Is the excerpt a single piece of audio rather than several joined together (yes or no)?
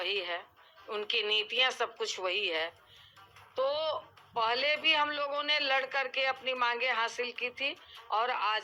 yes